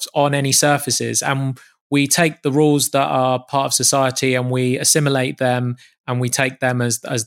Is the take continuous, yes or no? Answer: yes